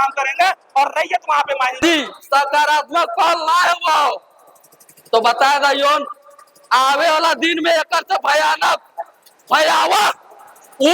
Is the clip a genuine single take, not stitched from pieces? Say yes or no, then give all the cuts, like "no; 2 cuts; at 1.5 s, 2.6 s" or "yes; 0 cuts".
no; 1 cut; at 1.8 s